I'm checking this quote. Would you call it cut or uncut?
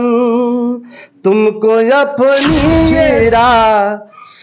cut